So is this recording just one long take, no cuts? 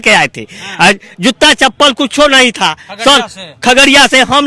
yes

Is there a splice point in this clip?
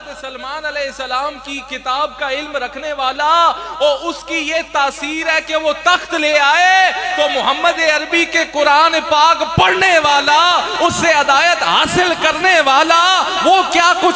no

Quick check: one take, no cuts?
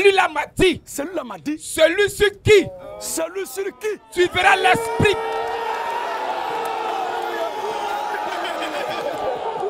yes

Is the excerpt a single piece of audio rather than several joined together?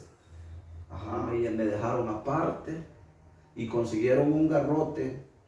no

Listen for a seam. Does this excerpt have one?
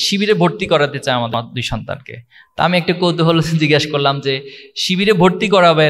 yes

